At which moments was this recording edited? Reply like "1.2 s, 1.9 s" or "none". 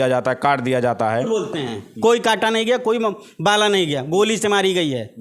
1.2 s